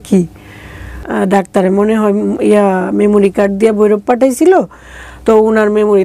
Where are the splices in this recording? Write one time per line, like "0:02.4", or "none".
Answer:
0:01.0